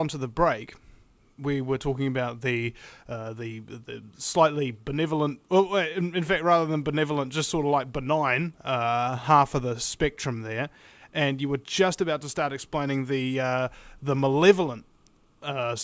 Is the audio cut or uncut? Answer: cut